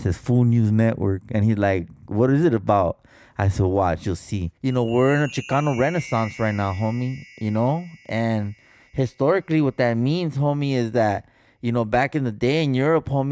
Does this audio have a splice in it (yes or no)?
yes